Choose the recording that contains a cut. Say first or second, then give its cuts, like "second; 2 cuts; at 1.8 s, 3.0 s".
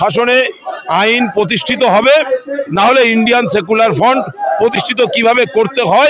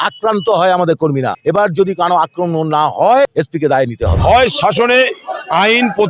second; 2 cuts; at 1.3 s, 3.7 s